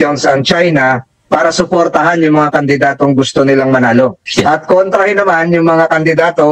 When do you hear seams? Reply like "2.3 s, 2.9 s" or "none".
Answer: 4.2 s